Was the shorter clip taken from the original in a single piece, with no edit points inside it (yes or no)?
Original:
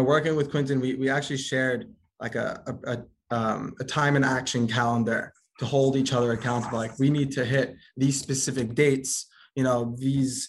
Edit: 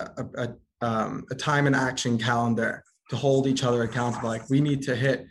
yes